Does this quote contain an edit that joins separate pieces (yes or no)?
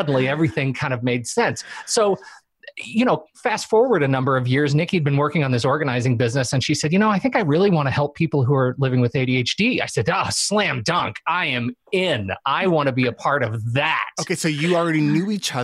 no